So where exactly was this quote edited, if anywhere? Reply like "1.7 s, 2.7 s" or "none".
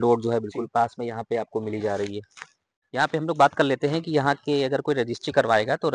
none